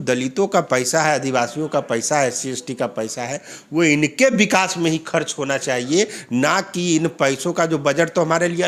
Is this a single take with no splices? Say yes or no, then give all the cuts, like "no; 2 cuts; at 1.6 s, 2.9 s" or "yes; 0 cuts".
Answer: yes; 0 cuts